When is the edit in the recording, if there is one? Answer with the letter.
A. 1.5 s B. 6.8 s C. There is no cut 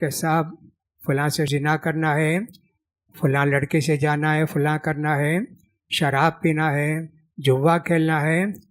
A